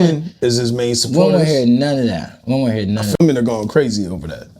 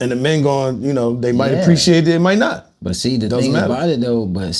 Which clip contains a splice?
first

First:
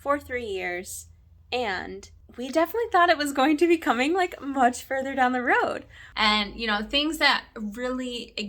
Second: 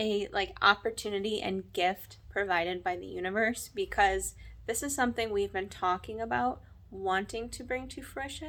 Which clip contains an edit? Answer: first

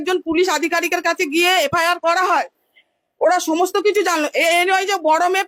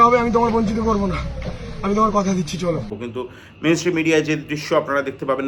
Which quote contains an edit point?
second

